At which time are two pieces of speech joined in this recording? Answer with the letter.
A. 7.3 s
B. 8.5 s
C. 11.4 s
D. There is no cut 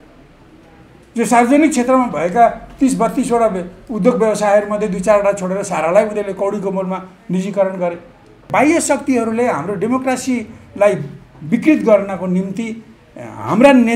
B